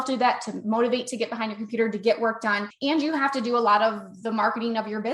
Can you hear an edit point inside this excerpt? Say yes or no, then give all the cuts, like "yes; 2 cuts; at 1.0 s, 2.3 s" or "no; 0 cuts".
yes; 1 cut; at 2.7 s